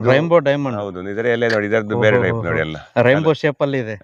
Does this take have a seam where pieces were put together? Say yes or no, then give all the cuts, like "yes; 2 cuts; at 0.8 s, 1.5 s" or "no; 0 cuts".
no; 0 cuts